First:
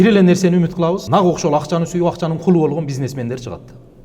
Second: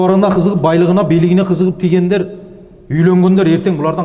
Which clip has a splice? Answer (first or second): first